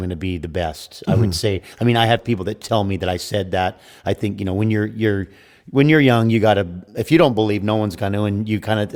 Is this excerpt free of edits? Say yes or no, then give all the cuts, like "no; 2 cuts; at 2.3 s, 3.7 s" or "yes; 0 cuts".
yes; 0 cuts